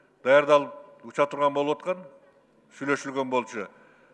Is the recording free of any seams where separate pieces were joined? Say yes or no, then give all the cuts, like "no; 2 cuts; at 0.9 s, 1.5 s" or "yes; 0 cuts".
yes; 0 cuts